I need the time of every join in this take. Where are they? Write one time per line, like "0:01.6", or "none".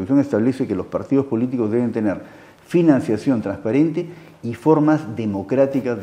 none